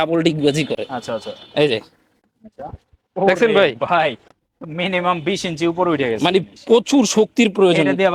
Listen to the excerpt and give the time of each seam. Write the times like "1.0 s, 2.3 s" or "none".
none